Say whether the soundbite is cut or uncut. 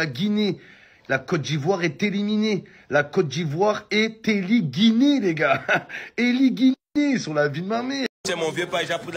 cut